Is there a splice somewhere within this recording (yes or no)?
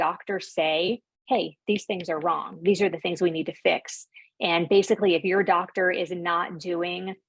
no